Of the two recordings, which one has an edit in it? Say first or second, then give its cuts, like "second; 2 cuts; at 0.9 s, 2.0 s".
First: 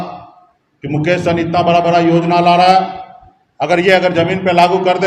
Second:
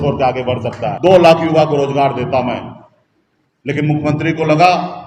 second; 1 cut; at 0.9 s